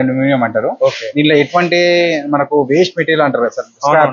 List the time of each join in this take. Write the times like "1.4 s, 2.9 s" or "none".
none

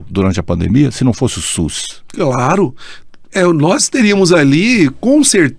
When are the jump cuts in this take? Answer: none

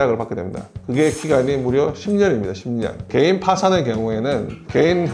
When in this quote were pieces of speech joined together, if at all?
3.0 s

